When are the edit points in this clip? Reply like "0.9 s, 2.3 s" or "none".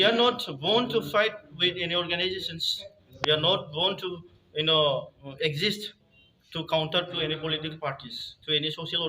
5.2 s

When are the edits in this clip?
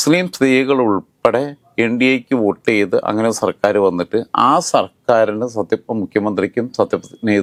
none

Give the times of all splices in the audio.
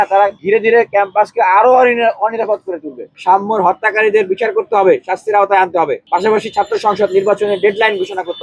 3.1 s

